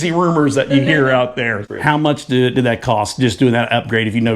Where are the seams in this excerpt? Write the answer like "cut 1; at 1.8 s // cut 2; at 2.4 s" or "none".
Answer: cut 1; at 1.6 s